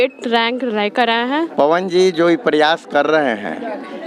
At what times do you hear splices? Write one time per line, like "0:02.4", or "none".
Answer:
0:01.5